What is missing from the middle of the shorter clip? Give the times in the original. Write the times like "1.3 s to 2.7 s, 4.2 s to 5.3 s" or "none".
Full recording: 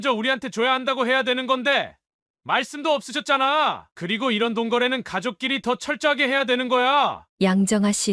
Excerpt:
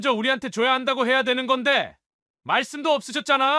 none

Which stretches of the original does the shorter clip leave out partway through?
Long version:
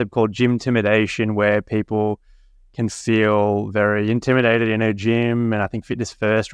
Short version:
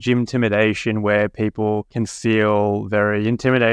2.2 s to 2.7 s

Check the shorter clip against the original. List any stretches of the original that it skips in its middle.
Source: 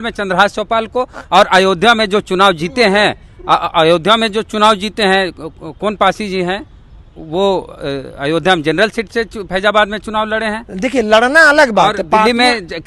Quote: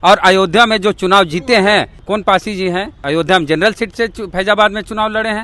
3.2 s to 5.7 s, 6.7 s to 8.1 s

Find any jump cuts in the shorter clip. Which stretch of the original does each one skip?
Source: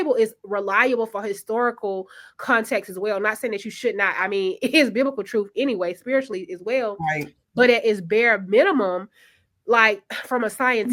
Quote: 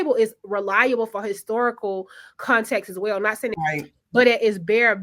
3.5 s to 7.0 s

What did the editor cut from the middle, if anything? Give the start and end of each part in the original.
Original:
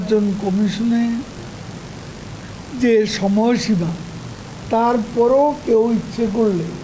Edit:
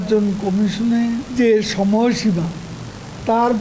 1.3 s to 2.7 s

